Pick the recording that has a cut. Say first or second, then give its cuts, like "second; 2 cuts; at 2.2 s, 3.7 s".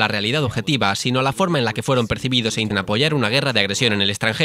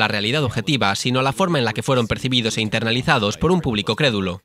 second; 1 cut; at 2.7 s